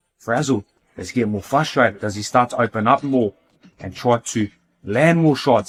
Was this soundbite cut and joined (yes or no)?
no